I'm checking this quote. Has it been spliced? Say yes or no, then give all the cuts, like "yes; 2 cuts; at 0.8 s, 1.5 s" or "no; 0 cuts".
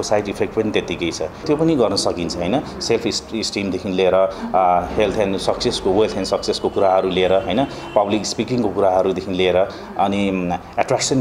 yes; 1 cut; at 1.4 s